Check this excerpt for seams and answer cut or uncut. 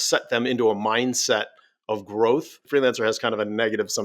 cut